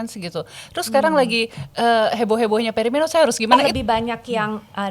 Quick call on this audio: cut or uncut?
cut